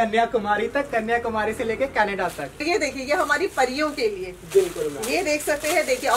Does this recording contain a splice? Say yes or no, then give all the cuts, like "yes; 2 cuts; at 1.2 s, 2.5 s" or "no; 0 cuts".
yes; 1 cut; at 2.6 s